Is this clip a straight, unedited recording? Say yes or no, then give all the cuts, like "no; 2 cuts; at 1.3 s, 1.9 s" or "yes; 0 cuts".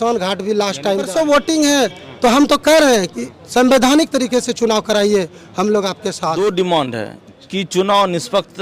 no; 2 cuts; at 1.1 s, 6.3 s